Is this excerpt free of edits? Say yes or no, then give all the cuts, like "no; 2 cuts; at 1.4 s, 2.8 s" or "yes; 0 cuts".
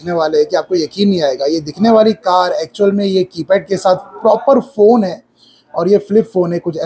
yes; 0 cuts